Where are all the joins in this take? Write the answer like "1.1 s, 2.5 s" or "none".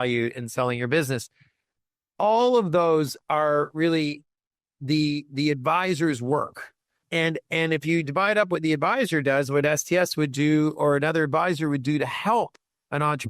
none